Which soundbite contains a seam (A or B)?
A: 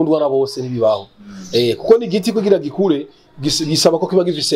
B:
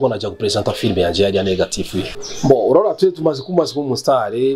B